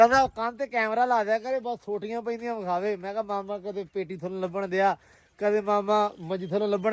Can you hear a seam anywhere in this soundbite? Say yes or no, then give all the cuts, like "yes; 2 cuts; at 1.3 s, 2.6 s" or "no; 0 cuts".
no; 0 cuts